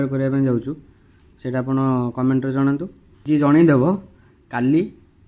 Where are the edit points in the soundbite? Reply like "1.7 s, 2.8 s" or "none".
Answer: 3.1 s